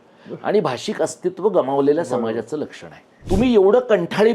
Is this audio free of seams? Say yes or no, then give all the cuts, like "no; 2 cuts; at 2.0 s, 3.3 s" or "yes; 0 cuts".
no; 1 cut; at 3.1 s